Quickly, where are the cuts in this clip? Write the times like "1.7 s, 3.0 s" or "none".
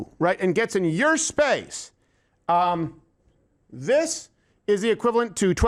none